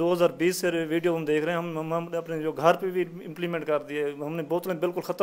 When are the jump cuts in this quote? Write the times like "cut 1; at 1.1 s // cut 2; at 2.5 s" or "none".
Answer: none